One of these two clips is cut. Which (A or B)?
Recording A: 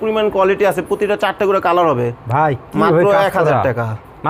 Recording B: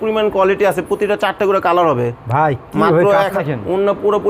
B